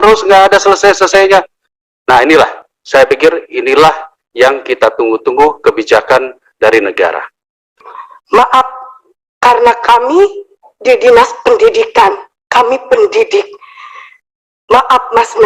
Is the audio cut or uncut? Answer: cut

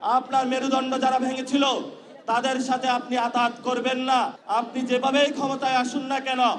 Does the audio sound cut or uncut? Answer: cut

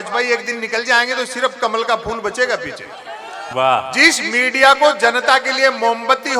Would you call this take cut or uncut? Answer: cut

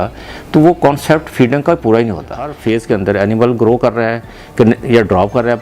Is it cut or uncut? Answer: cut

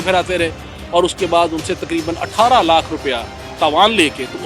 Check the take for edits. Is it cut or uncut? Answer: cut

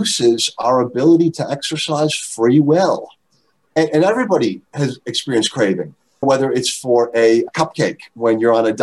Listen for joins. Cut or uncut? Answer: cut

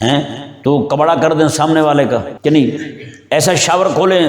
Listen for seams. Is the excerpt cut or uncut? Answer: cut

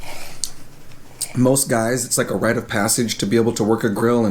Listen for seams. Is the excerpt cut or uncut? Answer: uncut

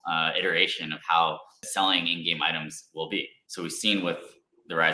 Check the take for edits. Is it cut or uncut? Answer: cut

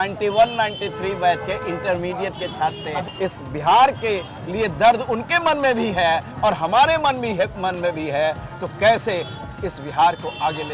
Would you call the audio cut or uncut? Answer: cut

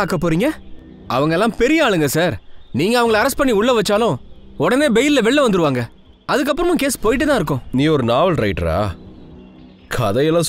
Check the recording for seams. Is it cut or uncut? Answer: cut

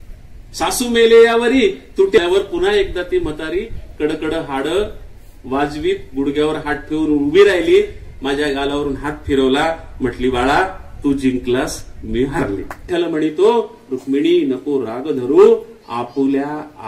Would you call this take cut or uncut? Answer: cut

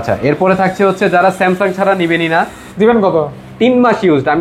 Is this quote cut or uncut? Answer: cut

